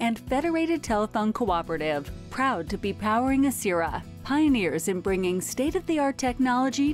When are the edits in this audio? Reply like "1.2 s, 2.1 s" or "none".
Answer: none

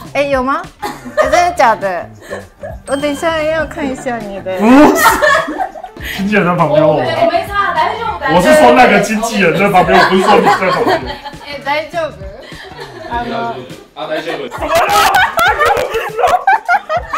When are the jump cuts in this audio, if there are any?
none

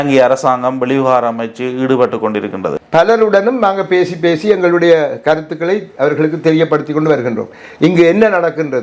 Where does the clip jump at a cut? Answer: 2.8 s

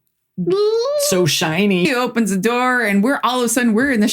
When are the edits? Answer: 1.9 s

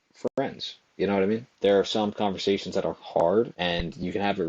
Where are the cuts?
1.5 s, 3.5 s

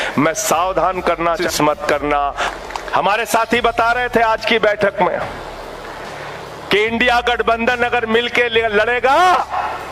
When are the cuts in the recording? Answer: 1.4 s, 2.4 s

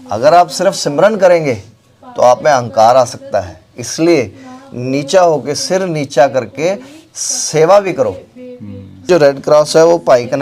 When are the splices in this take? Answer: 9.1 s

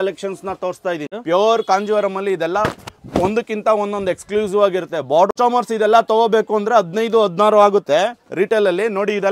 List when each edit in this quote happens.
1.1 s, 5.3 s

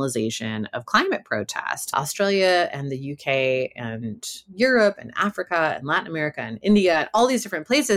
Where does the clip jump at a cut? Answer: 1.9 s

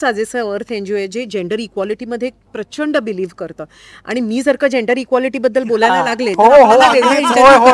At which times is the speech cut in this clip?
none

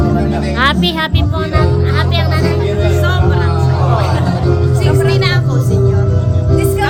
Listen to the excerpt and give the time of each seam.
none

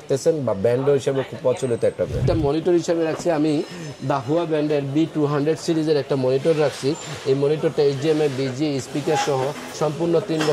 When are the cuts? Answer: 2.2 s

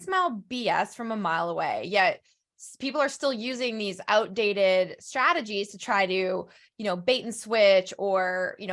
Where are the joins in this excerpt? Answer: none

